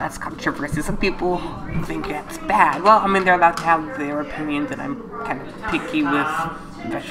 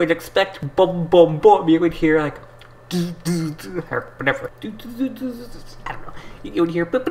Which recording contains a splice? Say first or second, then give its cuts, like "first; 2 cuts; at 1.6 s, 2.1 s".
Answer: second; 1 cut; at 4.5 s